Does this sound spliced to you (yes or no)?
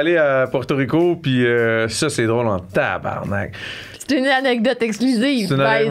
no